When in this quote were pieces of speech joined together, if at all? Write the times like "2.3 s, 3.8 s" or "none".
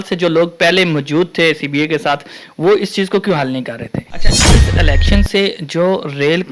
4.1 s

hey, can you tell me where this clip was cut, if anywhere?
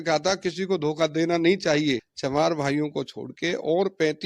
2.1 s

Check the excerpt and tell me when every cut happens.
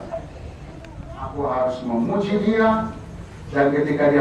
1.5 s

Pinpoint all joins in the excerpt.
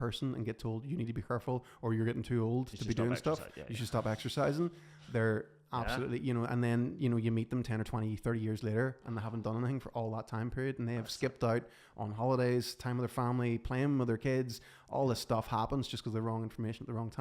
none

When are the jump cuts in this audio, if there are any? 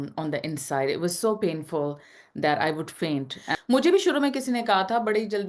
3.4 s

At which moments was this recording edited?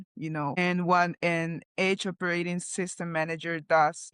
none

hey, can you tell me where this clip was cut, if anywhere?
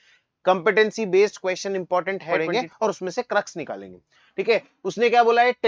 2.4 s

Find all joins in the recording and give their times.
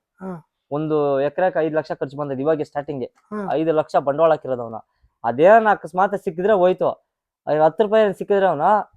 none

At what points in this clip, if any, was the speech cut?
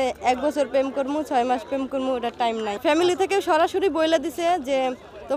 2.8 s

